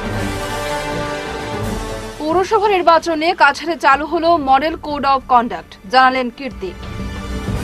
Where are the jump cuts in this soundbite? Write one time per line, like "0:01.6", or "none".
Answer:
0:01.7